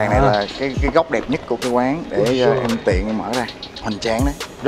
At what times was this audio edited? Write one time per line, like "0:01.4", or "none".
0:01.6
0:03.6